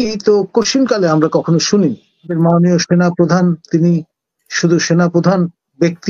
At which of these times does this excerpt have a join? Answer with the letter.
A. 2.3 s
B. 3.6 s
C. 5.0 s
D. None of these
A